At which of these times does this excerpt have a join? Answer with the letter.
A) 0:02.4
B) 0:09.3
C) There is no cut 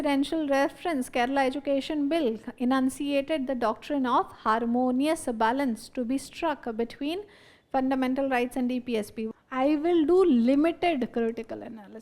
B